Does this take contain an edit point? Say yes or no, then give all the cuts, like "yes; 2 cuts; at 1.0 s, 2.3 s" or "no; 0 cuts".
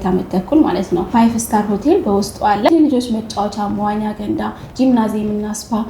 yes; 2 cuts; at 1.1 s, 2.7 s